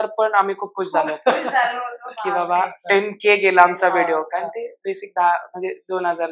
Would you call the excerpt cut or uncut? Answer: uncut